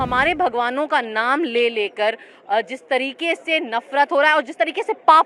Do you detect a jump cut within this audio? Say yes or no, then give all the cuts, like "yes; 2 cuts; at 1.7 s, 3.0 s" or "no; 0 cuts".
no; 0 cuts